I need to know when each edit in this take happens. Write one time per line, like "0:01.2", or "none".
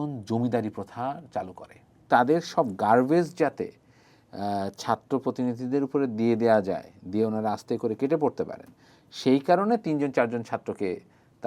0:02.0